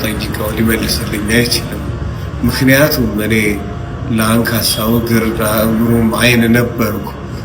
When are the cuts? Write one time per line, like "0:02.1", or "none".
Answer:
none